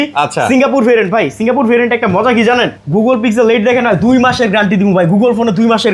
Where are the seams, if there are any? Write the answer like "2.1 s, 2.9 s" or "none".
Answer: 2.7 s